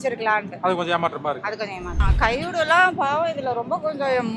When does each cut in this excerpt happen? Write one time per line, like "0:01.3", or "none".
0:01.9